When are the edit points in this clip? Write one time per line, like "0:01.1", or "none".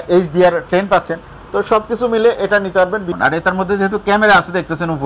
0:03.1